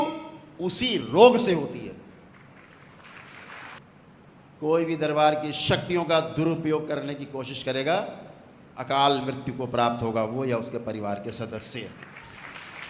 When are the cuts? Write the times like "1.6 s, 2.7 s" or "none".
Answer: 3.8 s